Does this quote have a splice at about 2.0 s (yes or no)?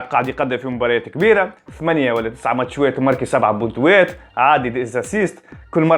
no